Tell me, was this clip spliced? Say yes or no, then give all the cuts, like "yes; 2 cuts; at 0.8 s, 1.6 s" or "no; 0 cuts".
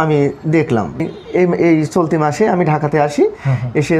yes; 1 cut; at 1.0 s